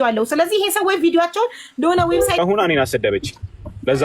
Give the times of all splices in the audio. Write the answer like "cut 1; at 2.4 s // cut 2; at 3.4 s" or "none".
cut 1; at 2.4 s